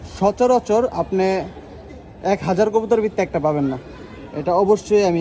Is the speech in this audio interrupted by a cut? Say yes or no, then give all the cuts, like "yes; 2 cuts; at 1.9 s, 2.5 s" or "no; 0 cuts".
no; 0 cuts